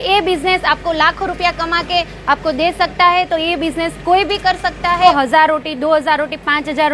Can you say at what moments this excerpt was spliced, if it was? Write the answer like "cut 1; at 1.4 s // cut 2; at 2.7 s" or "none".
cut 1; at 5.0 s